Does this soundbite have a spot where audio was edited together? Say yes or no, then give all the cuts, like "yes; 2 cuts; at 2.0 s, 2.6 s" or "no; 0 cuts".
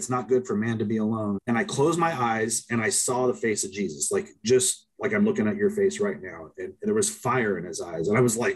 yes; 1 cut; at 1.4 s